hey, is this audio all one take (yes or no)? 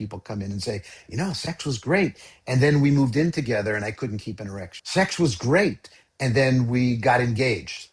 no